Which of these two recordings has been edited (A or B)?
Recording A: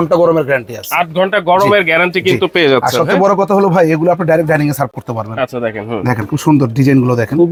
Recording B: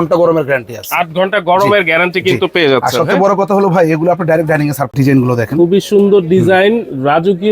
B